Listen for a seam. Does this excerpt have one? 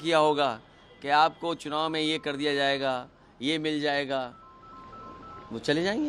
no; 0 cuts

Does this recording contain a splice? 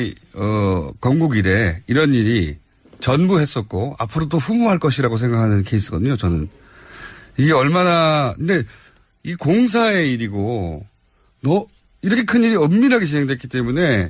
no; 0 cuts

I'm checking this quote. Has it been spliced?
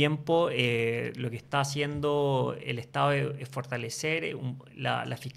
no; 0 cuts

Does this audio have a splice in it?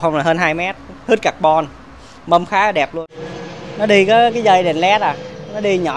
yes; 1 cut; at 3.0 s

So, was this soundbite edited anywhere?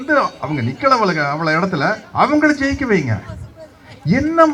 no; 0 cuts

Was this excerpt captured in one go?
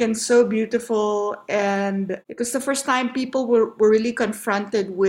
yes; 0 cuts

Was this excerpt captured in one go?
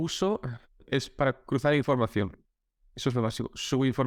yes; 0 cuts

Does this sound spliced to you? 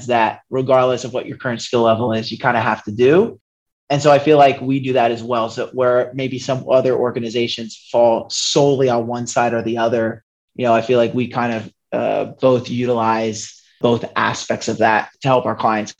yes; 2 cuts; at 13.8 s, 15.1 s

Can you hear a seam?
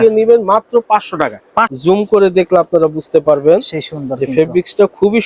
yes; 1 cut; at 1.7 s

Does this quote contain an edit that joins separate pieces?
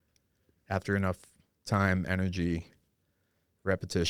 no; 0 cuts

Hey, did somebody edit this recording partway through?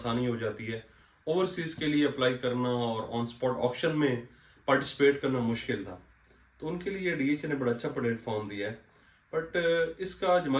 no; 0 cuts

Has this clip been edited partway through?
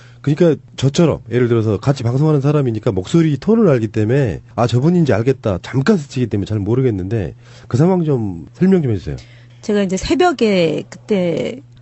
no; 0 cuts

